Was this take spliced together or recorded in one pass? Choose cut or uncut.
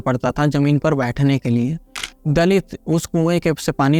uncut